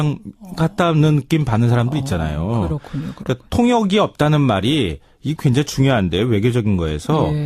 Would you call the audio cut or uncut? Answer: uncut